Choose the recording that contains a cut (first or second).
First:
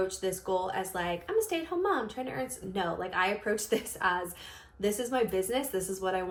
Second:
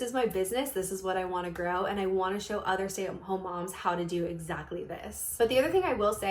second